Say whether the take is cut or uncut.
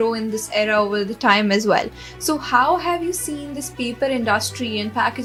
uncut